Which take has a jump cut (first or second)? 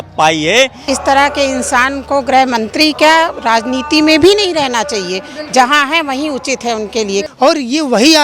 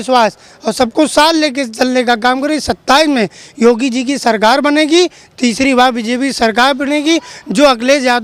first